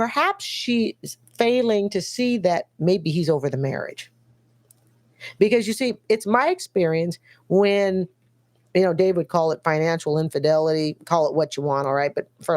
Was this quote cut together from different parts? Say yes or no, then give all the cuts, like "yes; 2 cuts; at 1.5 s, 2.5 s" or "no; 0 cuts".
no; 0 cuts